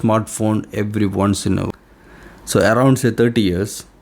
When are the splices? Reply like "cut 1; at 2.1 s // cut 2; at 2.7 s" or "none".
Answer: cut 1; at 1.7 s